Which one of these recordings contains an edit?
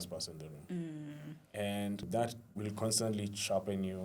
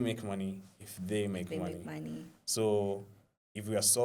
first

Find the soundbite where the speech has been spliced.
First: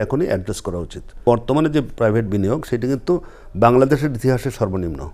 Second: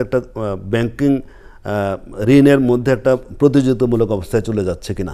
first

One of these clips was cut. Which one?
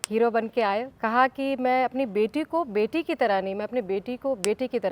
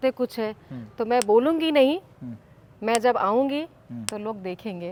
first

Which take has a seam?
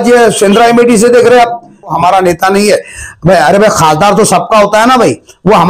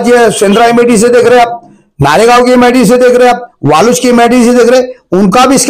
first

